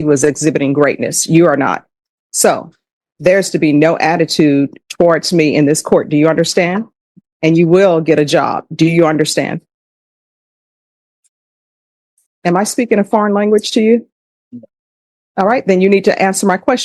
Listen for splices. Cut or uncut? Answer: uncut